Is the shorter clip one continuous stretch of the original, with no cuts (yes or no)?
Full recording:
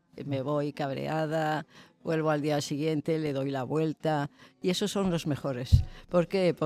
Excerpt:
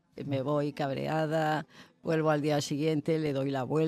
yes